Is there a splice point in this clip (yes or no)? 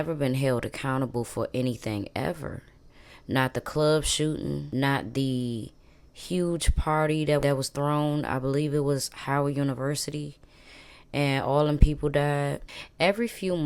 no